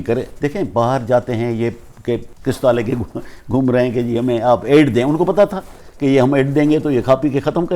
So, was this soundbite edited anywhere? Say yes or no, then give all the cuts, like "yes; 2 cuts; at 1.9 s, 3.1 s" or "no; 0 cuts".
yes; 1 cut; at 2.3 s